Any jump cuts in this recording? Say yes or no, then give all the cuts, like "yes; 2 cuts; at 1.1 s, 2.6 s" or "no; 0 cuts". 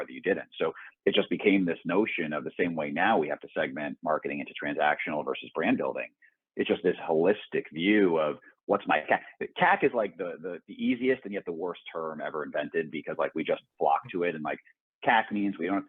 no; 0 cuts